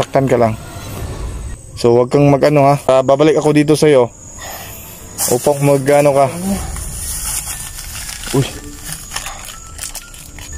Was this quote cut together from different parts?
yes; 1 cut; at 2.8 s

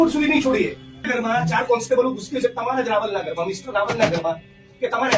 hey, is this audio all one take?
no; 1 cut; at 1.1 s

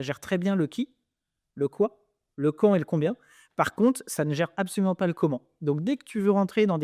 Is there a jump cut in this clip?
no; 0 cuts

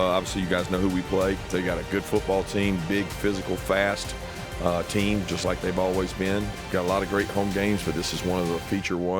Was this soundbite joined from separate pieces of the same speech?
yes; 2 cuts; at 1.4 s, 6.6 s

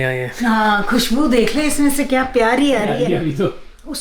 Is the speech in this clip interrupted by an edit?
yes; 1 cut; at 3.1 s

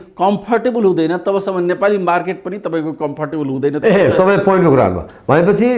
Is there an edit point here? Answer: no; 0 cuts

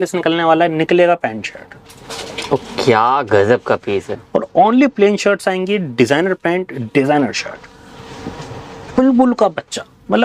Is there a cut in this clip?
no; 0 cuts

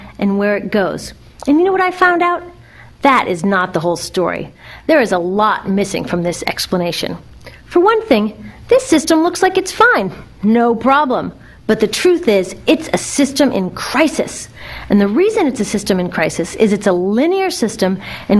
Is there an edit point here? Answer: yes; 1 cut; at 5.0 s

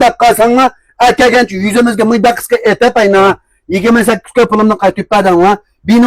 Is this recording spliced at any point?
no; 0 cuts

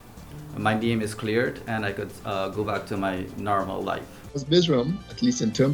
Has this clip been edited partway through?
yes; 1 cut; at 4.2 s

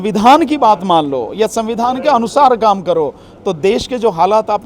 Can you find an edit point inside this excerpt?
no; 0 cuts

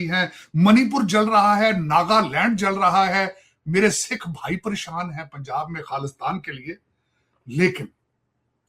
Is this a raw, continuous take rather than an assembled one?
yes; 0 cuts

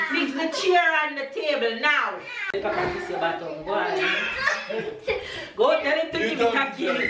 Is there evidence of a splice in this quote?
yes; 1 cut; at 2.5 s

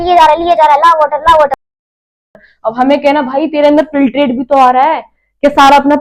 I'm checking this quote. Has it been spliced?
no; 0 cuts

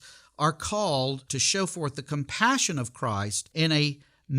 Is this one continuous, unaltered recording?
no; 2 cuts; at 1.3 s, 3.4 s

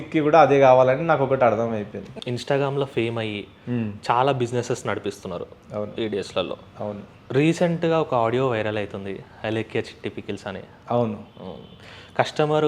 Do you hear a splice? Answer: yes; 1 cut; at 2.1 s

